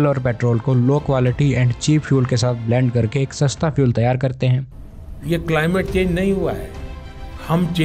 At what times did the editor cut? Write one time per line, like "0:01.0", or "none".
0:04.6